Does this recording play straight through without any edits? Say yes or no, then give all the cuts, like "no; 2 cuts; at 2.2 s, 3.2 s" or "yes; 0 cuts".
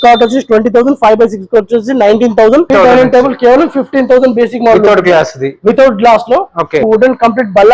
no; 2 cuts; at 2.7 s, 6.8 s